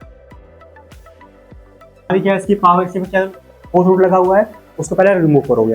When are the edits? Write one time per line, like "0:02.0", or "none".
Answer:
0:02.1